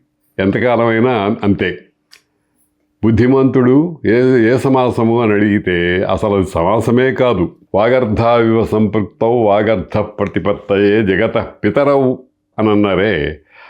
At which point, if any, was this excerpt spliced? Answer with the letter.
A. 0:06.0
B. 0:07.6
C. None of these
B